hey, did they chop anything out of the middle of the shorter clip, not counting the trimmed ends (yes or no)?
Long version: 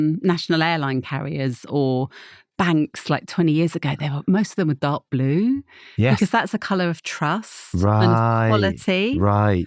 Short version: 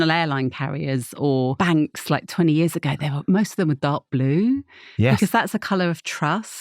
yes